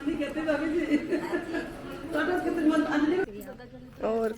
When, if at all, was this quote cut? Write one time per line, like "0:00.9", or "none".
0:03.2